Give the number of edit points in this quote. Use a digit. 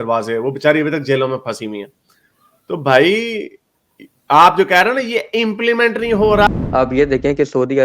1